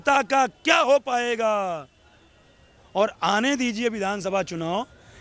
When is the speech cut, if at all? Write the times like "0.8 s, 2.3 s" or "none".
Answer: none